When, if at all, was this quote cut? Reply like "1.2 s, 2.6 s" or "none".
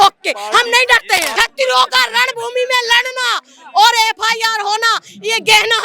1.3 s

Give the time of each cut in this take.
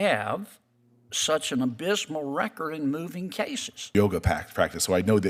3.9 s

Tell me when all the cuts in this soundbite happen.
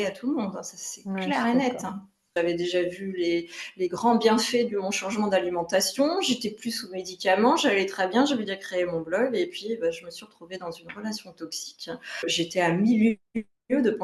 2.3 s, 12.3 s

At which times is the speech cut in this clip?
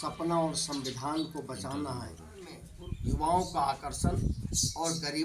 2.7 s

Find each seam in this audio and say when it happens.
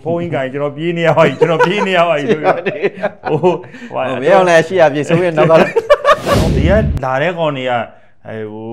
6.5 s

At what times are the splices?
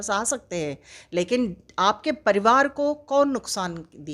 none

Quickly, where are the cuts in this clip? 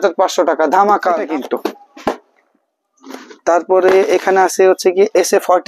1.3 s

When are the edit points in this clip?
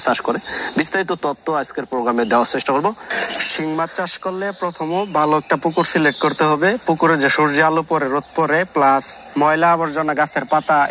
none

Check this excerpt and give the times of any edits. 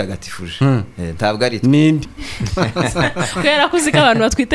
2.1 s

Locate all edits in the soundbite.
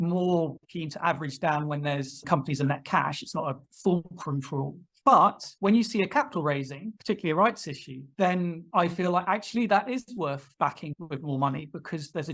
none

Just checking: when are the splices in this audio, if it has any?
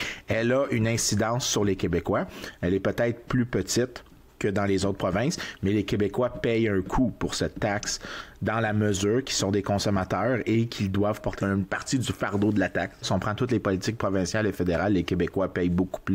13.1 s

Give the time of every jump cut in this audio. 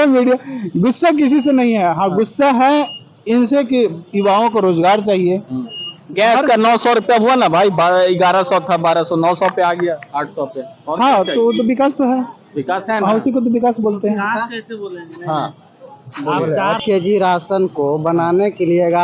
16.8 s

